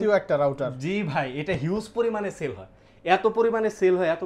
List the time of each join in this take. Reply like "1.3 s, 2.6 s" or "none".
none